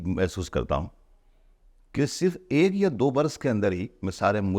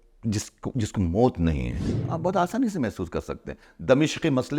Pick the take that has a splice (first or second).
second